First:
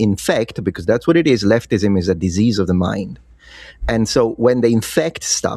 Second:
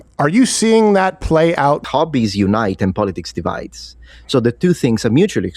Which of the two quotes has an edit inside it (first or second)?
second